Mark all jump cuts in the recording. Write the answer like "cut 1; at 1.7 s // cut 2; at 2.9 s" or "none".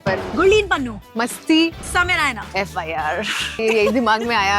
cut 1; at 2.4 s // cut 2; at 3.6 s